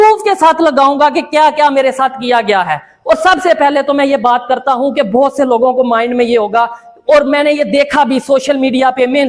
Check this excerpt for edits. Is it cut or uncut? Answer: uncut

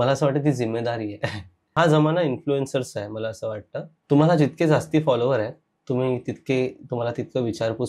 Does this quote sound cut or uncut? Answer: cut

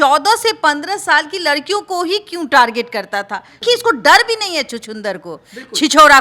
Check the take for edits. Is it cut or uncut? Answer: cut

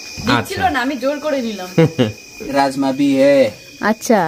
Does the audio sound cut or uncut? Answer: cut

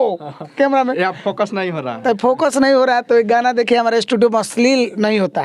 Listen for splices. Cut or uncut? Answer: uncut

